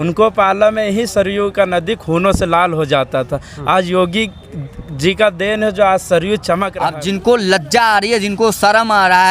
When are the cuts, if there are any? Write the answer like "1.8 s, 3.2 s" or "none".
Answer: 6.8 s